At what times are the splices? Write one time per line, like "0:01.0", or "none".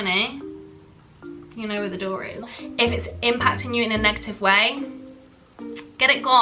0:02.5

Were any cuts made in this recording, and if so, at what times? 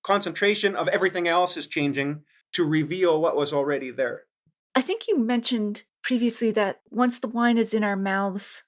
0:04.6
0:06.8

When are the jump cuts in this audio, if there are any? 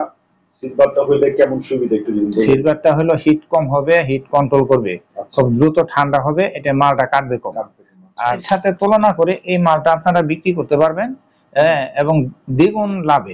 0:08.4

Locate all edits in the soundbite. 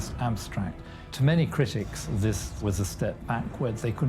0:01.0

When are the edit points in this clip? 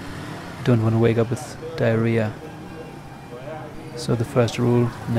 0:02.5

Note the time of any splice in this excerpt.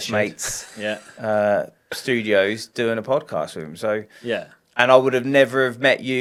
none

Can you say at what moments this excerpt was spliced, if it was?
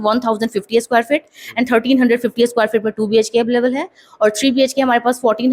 none

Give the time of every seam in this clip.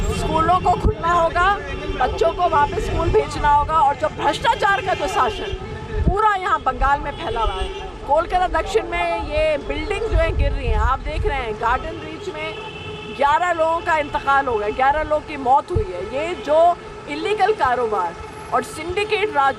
none

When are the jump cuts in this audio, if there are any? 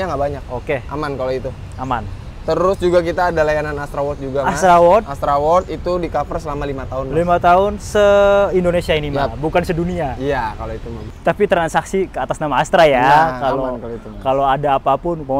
0:11.0

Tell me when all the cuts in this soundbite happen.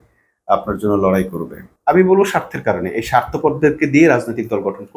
0:01.7

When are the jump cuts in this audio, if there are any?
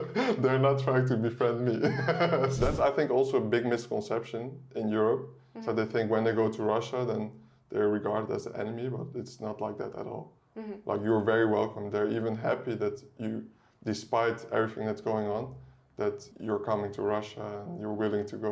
0:02.6
0:16.3

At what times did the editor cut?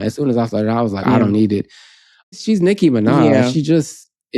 0:01.0
0:02.3

